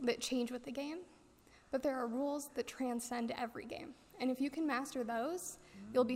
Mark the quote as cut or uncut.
uncut